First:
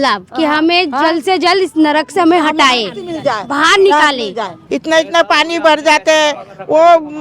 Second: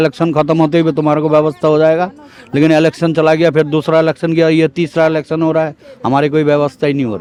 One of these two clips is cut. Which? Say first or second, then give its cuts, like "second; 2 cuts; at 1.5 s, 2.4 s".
first; 1 cut; at 4.5 s